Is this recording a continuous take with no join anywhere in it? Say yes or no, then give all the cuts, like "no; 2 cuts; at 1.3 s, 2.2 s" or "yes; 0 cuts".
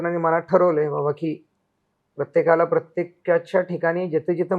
yes; 0 cuts